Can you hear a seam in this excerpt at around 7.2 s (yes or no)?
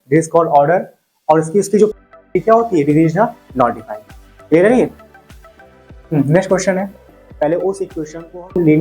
yes